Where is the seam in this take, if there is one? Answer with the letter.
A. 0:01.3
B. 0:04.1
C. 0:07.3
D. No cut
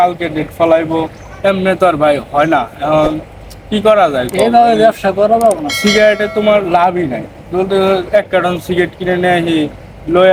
D